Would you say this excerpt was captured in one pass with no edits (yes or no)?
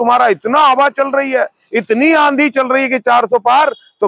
yes